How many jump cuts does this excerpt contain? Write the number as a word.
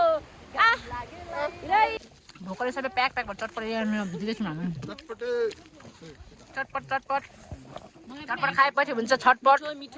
one